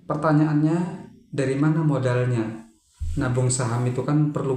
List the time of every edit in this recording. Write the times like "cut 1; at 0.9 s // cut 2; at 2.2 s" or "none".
none